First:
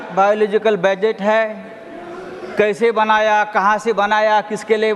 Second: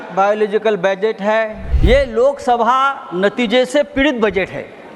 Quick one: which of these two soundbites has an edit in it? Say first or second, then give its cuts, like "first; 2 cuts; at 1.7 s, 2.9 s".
second; 1 cut; at 1.7 s